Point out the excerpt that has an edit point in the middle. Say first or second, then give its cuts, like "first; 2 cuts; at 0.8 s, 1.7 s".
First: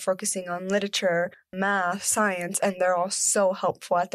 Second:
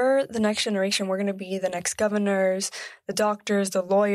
first; 1 cut; at 1.4 s